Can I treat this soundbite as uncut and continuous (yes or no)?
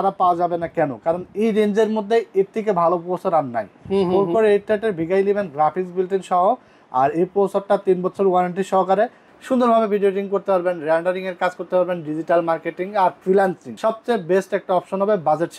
no